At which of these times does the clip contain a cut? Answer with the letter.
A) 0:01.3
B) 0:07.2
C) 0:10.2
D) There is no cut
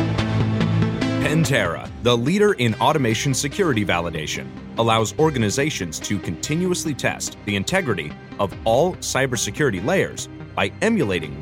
A